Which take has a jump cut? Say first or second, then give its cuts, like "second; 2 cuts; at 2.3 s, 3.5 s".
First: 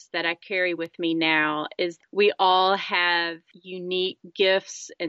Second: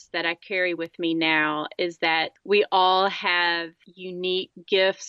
first; 1 cut; at 2.0 s